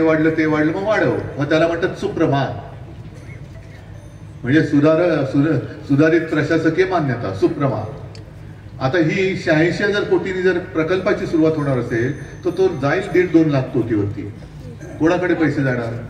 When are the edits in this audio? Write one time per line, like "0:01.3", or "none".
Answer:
none